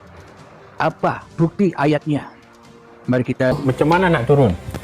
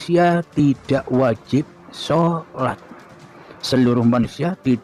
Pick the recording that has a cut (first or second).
first